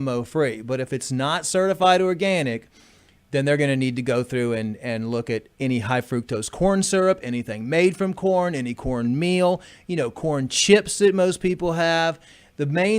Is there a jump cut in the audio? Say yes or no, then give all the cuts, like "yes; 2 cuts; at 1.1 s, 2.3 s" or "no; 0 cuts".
yes; 1 cut; at 6.2 s